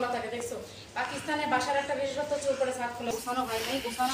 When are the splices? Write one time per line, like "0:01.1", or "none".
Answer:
0:03.1